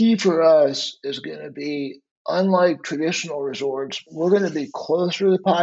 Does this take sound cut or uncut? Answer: cut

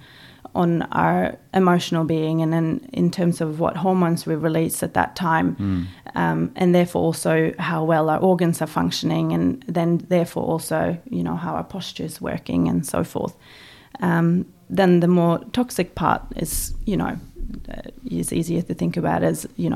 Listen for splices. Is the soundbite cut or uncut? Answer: uncut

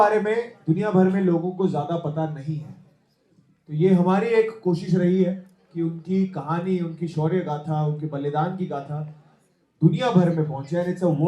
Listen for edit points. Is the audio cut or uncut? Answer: uncut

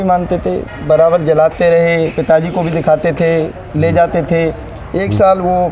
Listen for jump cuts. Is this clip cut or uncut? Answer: uncut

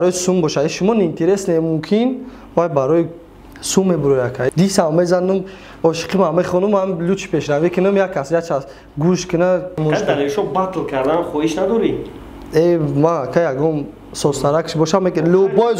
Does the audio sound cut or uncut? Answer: cut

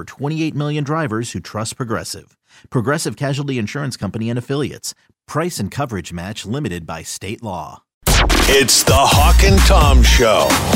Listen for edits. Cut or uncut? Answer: cut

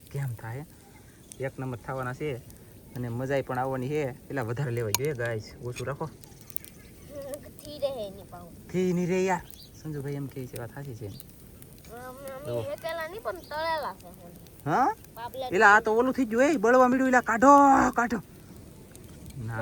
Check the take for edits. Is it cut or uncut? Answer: uncut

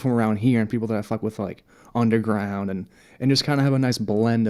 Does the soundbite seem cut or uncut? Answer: uncut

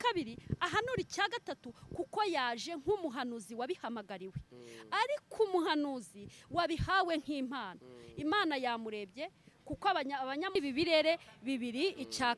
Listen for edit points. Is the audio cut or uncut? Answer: cut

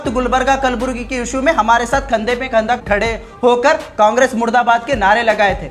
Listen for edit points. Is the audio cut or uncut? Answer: cut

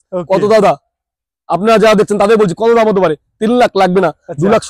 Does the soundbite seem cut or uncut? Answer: uncut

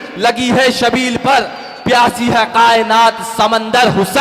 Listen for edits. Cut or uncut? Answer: uncut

